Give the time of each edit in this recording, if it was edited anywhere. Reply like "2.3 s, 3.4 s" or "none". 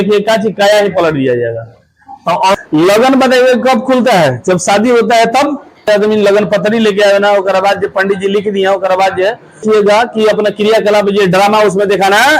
2.5 s, 5.9 s, 9.6 s